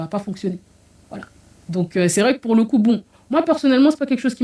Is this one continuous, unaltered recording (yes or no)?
yes